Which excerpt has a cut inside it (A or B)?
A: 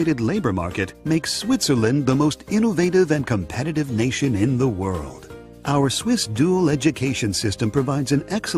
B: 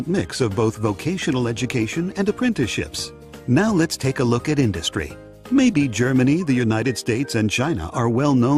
A